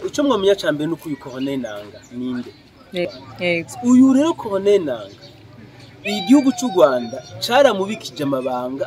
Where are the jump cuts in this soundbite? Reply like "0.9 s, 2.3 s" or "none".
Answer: 3.0 s